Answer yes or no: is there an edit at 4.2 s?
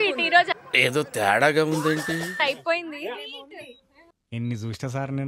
yes